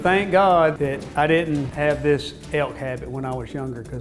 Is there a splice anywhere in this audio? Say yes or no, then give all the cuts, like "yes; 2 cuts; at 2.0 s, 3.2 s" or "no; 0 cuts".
yes; 3 cuts; at 1.0 s, 1.7 s, 2.3 s